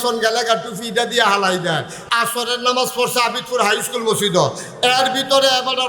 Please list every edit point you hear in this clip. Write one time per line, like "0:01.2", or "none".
0:02.0